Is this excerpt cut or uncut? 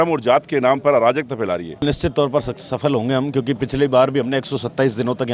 cut